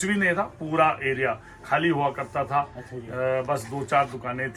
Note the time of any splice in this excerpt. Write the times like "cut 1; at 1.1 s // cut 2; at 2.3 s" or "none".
none